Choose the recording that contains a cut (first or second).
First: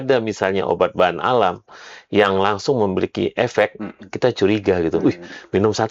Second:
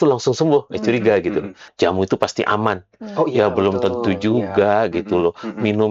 second